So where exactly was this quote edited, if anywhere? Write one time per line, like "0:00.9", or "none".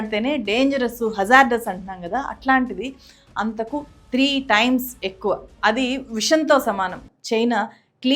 0:07.1